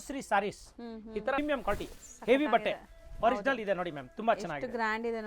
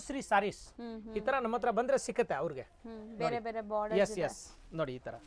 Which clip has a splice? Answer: first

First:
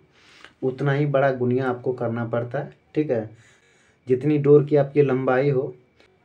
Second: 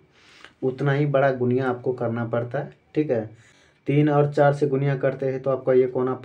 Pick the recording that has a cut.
second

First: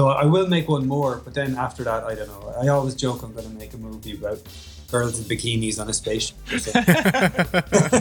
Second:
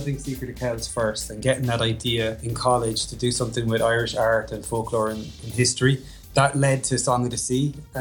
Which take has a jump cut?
second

